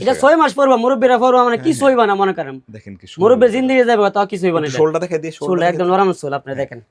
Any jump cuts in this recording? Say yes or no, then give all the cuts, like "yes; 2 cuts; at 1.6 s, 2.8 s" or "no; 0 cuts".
no; 0 cuts